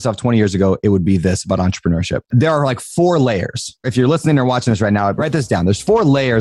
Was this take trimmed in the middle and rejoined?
yes; 3 cuts; at 2.2 s, 3.9 s, 5.2 s

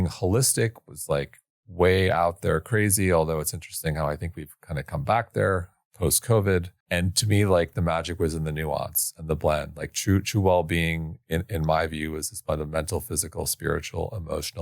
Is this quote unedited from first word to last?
no; 1 cut; at 6.8 s

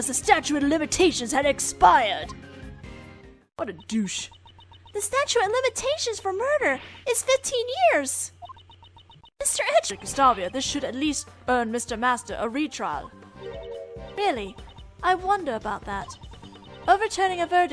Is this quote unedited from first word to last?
yes; 0 cuts

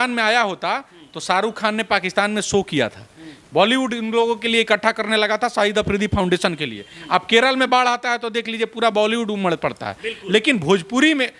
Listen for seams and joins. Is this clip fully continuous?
yes; 0 cuts

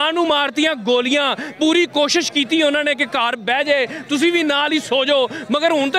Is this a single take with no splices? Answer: yes; 0 cuts

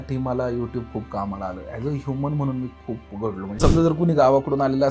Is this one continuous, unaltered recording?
no; 1 cut; at 3.5 s

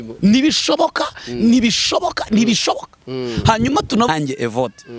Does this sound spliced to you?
yes; 1 cut; at 4.1 s

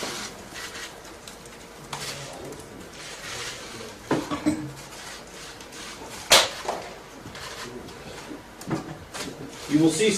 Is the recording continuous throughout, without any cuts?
yes; 0 cuts

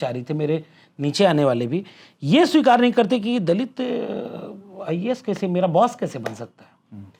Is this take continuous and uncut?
yes; 0 cuts

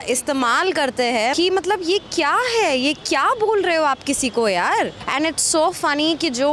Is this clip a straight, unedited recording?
no; 2 cuts; at 1.3 s, 5.0 s

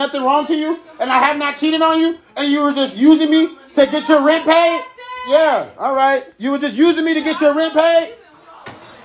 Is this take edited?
no; 0 cuts

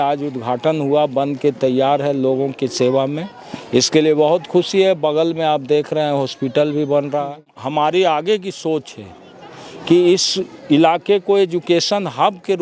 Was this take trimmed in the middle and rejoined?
yes; 1 cut; at 7.6 s

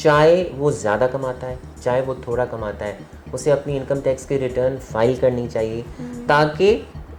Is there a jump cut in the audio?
no; 0 cuts

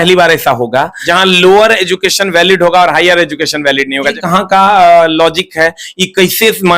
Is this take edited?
yes; 2 cuts; at 1.0 s, 4.2 s

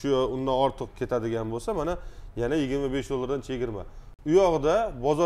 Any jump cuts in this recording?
no; 0 cuts

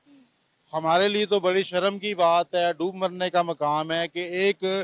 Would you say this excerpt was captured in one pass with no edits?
yes; 0 cuts

